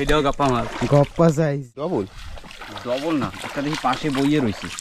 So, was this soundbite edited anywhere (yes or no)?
yes